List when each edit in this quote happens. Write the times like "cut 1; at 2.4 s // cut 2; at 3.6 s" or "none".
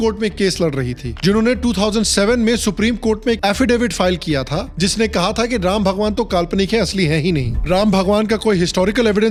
none